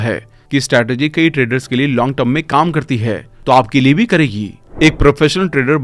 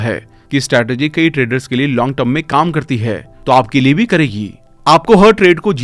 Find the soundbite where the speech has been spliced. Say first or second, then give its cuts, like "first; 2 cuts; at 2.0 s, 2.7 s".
first; 1 cut; at 4.6 s